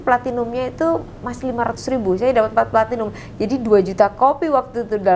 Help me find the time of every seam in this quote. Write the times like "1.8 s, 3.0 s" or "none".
none